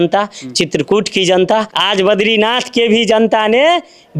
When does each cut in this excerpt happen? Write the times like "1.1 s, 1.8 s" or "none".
1.8 s